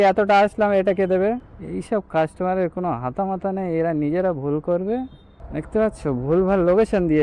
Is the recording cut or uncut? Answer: cut